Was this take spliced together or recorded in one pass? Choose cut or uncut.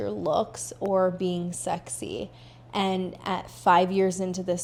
uncut